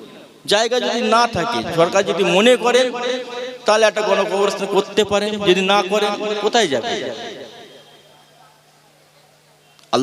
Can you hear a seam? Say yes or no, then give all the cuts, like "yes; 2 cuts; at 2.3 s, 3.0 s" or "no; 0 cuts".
no; 0 cuts